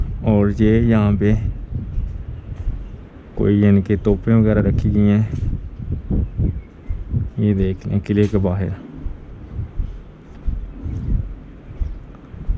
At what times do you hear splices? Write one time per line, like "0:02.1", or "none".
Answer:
none